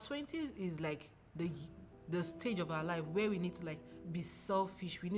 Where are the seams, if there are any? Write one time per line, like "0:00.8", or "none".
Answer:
none